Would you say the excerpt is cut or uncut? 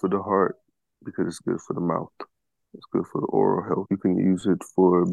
cut